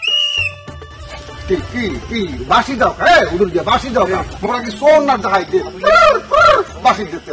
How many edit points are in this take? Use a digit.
0